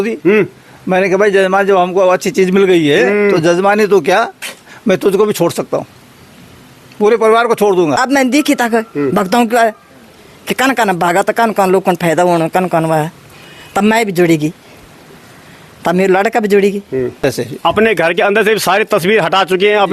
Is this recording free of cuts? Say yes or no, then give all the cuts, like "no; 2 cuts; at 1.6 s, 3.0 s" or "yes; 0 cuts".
no; 2 cuts; at 8.0 s, 17.2 s